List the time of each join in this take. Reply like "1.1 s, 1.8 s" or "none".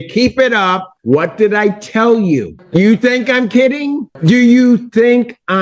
0.9 s, 2.6 s, 4.1 s